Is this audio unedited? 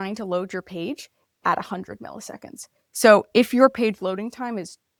yes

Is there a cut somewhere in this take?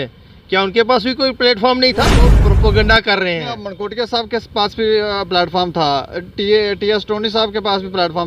yes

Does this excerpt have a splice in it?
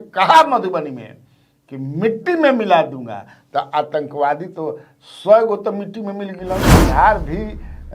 yes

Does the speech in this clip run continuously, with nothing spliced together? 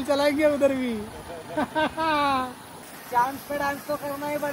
yes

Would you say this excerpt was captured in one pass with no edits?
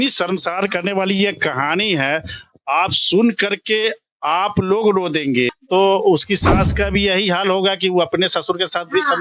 no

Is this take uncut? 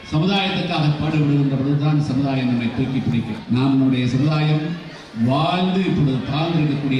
no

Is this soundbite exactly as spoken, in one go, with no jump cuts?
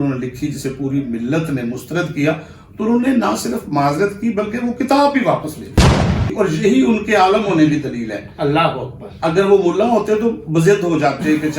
no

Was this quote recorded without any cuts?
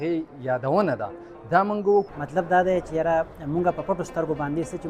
no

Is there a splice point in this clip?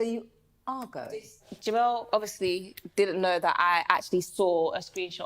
yes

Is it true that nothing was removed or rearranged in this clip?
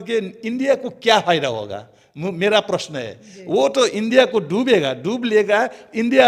yes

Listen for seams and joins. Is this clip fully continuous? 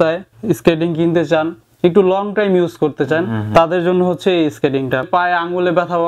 no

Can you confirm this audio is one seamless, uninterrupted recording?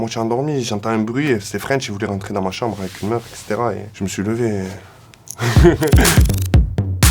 no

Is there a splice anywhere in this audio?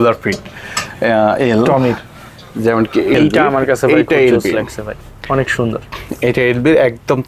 yes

